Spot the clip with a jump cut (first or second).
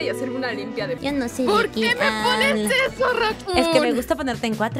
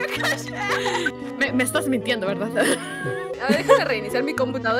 first